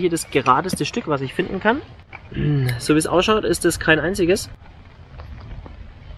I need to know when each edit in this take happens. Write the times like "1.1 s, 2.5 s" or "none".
none